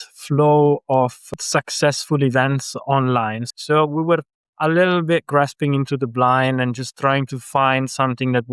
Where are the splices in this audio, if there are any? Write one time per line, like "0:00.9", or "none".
0:01.2
0:03.4